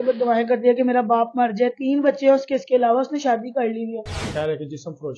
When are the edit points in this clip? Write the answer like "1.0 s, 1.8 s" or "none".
4.3 s